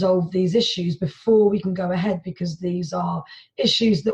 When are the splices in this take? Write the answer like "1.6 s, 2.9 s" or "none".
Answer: none